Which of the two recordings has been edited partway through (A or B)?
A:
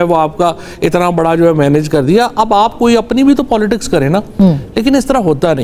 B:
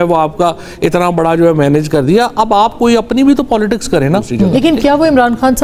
B